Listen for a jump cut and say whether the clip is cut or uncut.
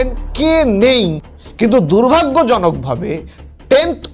cut